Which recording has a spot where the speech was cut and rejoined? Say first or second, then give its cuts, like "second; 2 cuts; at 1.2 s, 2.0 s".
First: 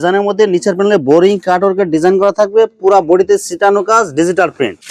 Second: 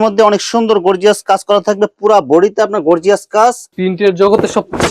second; 1 cut; at 3.7 s